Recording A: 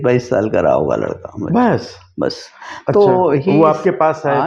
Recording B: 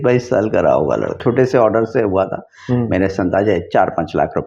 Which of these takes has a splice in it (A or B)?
B